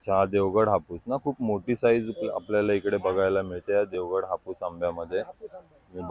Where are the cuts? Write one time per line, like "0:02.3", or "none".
none